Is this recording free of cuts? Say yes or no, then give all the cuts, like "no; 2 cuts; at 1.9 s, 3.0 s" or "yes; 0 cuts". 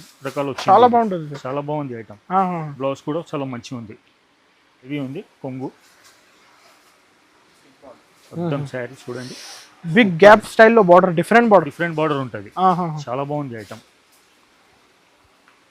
no; 1 cut; at 4.9 s